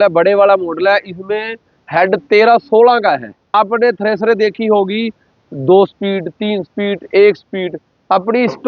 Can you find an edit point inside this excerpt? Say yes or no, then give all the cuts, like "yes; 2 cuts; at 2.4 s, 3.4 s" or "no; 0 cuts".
yes; 1 cut; at 3.5 s